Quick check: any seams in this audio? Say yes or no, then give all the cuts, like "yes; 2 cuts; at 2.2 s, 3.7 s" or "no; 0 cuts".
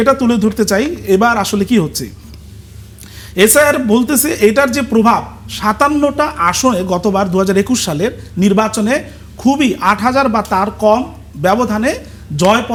no; 0 cuts